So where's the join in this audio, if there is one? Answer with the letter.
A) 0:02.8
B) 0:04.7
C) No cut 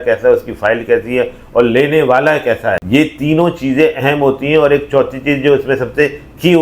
A